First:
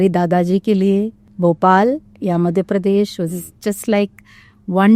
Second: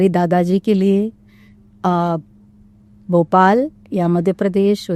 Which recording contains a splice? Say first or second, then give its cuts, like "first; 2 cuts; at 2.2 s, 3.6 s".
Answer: first; 1 cut; at 1.2 s